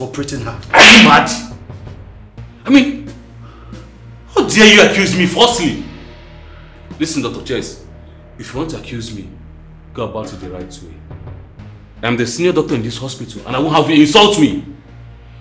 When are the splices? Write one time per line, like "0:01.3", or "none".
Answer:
none